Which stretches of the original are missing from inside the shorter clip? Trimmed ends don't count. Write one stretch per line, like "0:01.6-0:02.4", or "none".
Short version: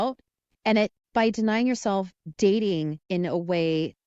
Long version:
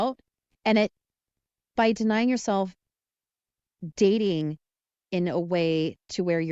0:01.0-0:01.6
0:02.8-0:03.8
0:04.6-0:05.0